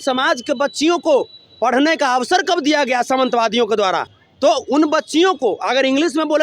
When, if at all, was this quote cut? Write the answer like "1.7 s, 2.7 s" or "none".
none